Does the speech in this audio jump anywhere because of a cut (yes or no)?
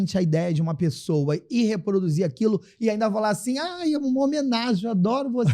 no